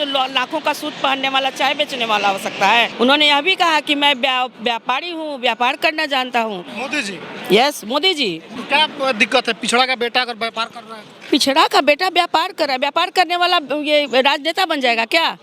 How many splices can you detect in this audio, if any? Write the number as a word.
two